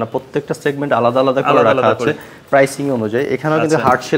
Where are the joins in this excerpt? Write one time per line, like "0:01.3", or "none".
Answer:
none